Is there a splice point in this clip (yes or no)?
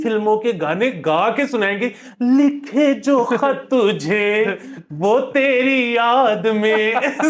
no